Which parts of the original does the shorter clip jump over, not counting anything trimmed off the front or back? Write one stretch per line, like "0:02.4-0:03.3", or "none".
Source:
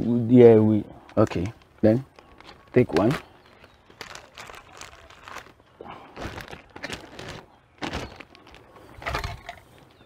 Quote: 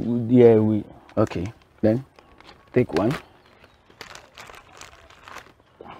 none